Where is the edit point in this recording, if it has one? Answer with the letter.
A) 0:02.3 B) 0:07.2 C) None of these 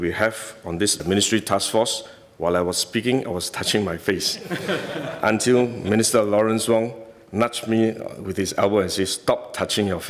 C